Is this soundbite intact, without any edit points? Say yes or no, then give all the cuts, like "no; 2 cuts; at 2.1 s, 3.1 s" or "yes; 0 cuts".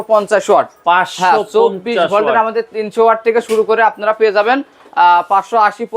yes; 0 cuts